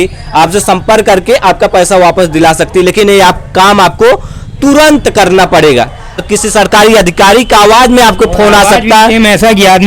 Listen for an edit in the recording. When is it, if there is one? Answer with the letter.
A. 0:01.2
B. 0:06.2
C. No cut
B